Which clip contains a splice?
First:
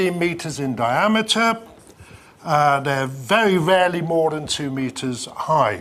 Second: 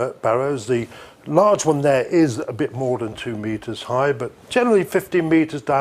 first; 1 cut; at 4.1 s

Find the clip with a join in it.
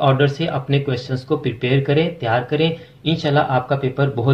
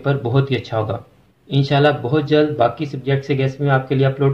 second; 1 cut; at 1.4 s

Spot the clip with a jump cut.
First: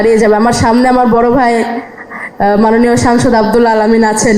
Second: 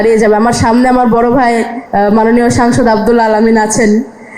second; 1 cut; at 1.8 s

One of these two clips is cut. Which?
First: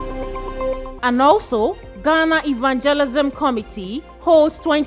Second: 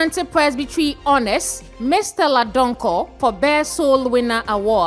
first; 1 cut; at 0.9 s

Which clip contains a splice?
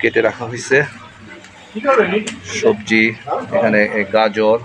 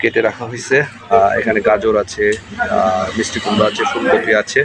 second; 1 cut; at 1.1 s

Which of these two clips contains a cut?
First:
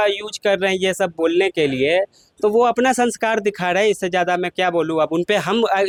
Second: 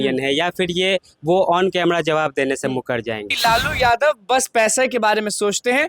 second; 1 cut; at 3.3 s

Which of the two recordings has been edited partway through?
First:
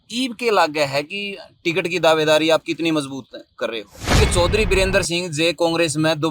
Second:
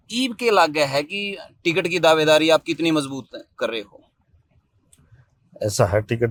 first; 1 cut; at 4.2 s

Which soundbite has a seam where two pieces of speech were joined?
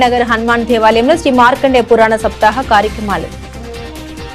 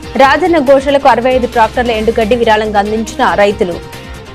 first; 1 cut; at 3.3 s

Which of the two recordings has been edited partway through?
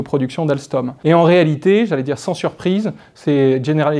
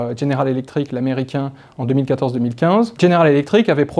first; 1 cut; at 0.9 s

